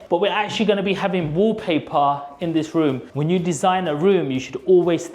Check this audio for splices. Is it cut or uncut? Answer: cut